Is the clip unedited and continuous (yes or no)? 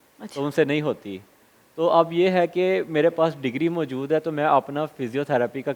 yes